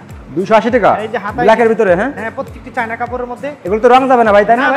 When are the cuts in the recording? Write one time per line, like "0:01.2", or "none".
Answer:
none